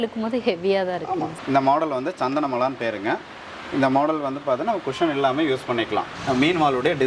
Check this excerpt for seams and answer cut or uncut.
cut